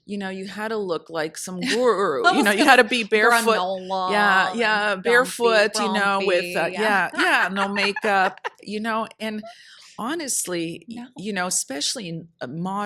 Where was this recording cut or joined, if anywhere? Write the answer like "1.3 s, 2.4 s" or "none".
none